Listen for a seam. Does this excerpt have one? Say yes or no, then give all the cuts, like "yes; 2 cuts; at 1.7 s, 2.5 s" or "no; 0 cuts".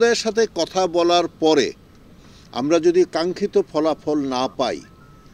no; 0 cuts